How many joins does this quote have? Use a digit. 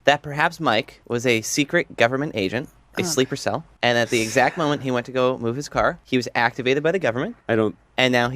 3